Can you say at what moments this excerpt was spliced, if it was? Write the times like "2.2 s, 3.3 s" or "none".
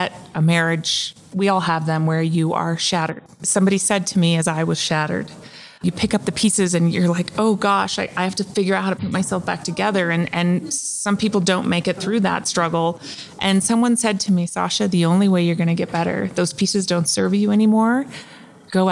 none